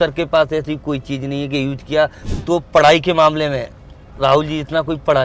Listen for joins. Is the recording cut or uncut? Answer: cut